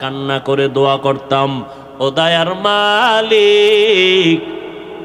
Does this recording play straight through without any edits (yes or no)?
yes